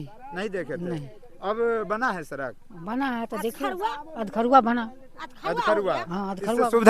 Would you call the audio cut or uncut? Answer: uncut